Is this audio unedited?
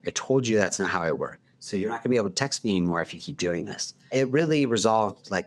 no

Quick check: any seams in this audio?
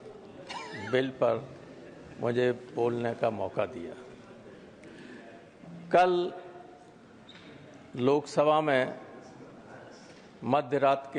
no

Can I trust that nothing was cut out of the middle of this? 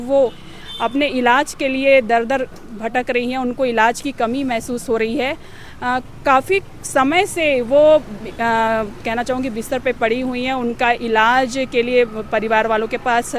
yes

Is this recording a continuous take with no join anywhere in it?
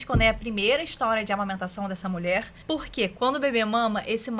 no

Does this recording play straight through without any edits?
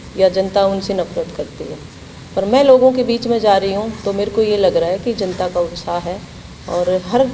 yes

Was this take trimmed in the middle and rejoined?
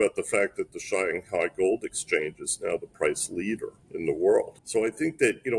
yes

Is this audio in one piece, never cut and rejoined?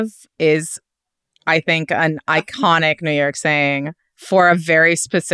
yes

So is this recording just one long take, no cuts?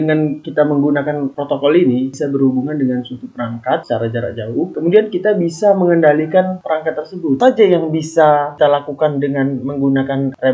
no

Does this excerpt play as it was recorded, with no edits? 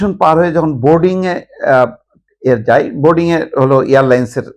yes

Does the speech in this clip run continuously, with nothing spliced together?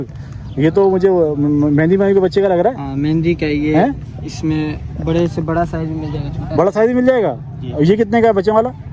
yes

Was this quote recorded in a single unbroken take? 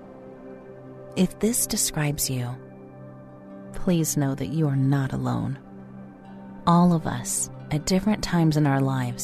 no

